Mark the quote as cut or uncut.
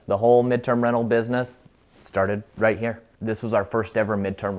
cut